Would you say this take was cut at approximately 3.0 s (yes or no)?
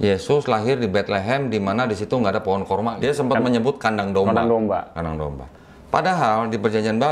yes